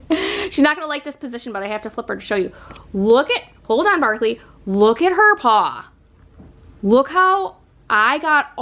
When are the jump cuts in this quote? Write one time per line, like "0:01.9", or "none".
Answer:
none